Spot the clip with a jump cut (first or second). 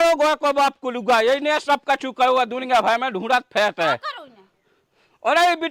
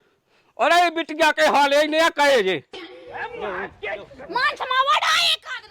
second